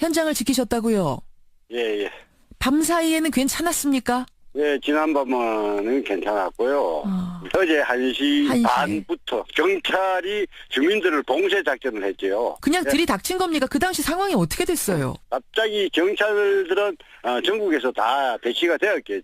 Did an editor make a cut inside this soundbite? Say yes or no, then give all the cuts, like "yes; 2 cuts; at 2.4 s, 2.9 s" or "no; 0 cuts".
yes; 1 cut; at 5.7 s